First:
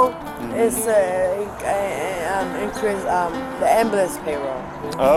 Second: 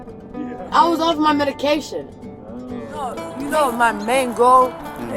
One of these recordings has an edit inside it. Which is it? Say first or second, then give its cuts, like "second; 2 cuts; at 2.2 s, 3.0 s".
second; 1 cut; at 3.2 s